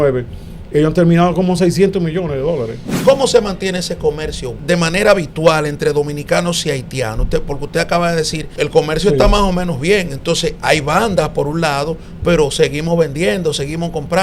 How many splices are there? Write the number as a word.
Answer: three